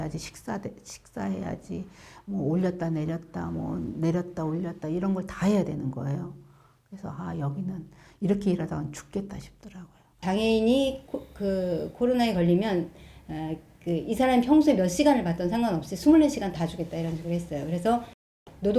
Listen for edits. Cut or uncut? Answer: cut